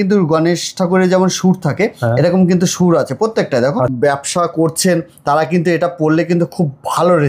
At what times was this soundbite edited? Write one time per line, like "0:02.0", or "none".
0:03.9

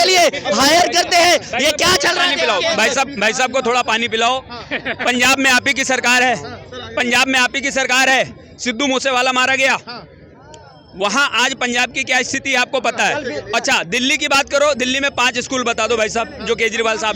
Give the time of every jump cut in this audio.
none

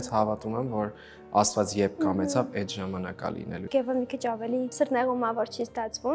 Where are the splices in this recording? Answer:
0:03.6
0:04.7

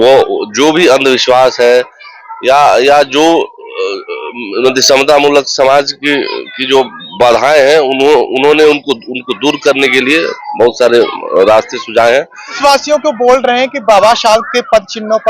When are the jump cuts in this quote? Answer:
0:12.5

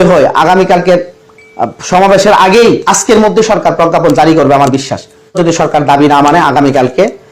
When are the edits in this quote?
0:05.4

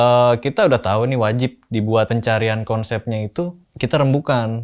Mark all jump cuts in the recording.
0:02.1
0:03.6

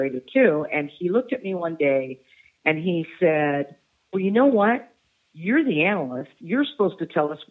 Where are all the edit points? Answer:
none

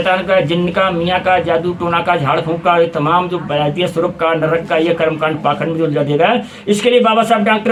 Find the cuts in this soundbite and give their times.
none

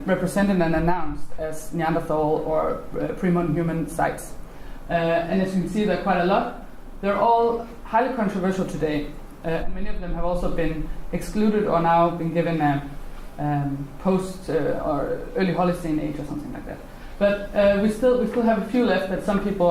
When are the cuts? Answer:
none

